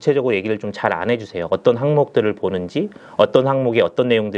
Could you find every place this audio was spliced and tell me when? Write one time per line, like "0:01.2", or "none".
none